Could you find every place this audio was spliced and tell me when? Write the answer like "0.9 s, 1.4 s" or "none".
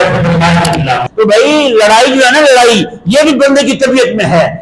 1.1 s